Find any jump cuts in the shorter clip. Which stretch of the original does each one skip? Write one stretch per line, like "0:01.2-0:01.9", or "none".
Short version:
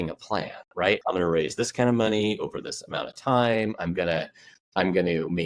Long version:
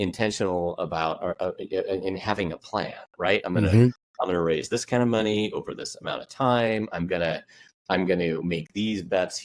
0:03.4-0:04.1